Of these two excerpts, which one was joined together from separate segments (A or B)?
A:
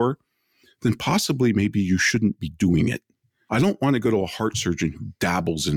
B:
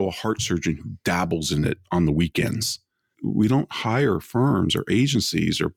B